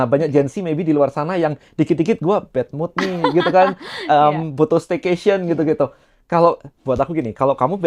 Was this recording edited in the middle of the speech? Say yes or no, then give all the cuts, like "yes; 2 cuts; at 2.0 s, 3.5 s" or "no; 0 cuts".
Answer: no; 0 cuts